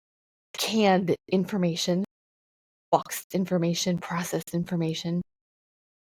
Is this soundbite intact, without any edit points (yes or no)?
yes